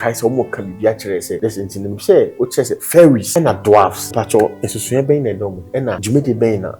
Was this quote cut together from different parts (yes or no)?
yes